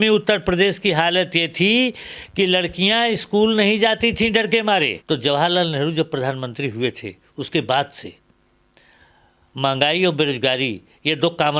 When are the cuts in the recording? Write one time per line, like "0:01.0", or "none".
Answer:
0:04.9